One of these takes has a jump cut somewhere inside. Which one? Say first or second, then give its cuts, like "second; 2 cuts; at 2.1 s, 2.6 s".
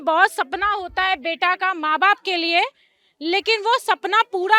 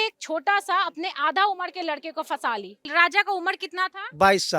second; 1 cut; at 2.8 s